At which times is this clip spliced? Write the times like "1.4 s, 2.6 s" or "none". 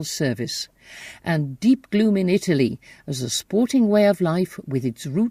3.8 s